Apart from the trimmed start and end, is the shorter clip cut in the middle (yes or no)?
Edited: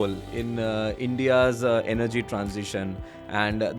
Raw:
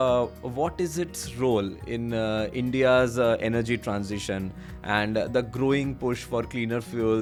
no